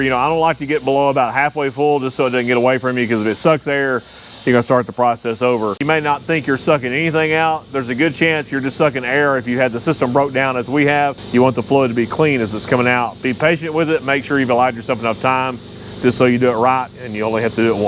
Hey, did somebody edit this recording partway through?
yes; 2 cuts; at 5.8 s, 11.2 s

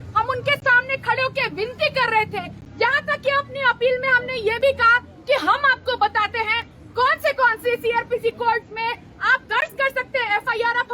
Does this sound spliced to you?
no; 0 cuts

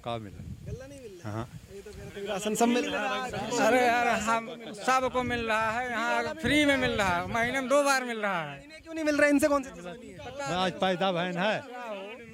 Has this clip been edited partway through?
no; 0 cuts

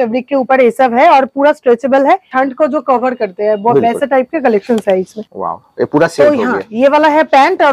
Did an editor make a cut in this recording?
yes; 2 cuts; at 2.3 s, 5.2 s

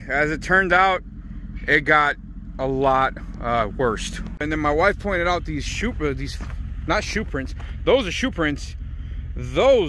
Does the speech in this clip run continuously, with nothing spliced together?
no; 1 cut; at 4.4 s

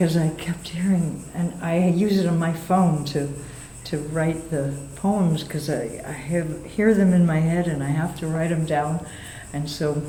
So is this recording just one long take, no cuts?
yes; 0 cuts

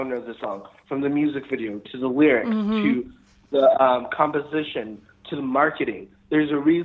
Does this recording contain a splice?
no; 0 cuts

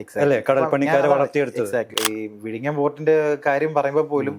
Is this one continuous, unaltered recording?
no; 1 cut; at 1.9 s

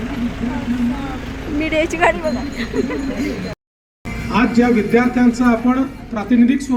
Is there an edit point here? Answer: no; 0 cuts

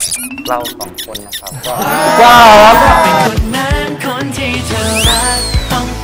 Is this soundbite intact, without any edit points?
yes; 0 cuts

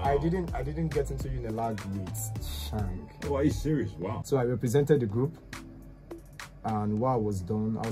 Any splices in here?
yes; 1 cut; at 4.2 s

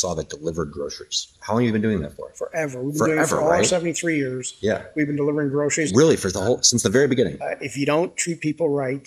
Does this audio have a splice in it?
yes; 2 cuts; at 1.3 s, 7.4 s

